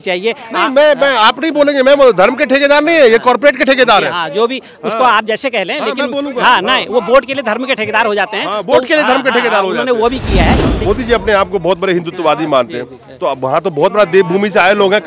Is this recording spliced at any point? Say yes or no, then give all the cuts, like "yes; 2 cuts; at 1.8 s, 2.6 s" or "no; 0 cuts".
yes; 1 cut; at 10.7 s